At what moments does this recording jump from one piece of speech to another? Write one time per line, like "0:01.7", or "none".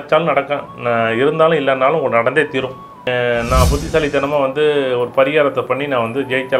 0:03.1